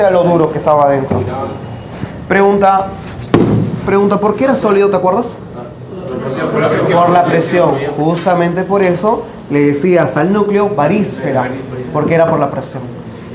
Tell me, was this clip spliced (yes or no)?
no